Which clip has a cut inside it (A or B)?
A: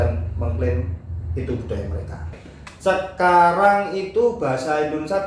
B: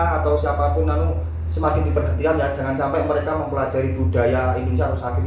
A